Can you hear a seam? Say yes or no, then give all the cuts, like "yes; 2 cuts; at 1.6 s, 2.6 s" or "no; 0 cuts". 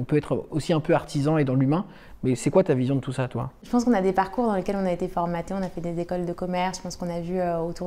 no; 0 cuts